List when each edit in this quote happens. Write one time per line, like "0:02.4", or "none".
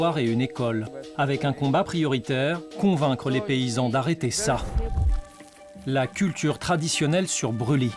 0:01.0
0:02.7